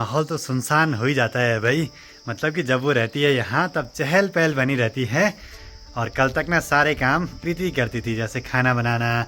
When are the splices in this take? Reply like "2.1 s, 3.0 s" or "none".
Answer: none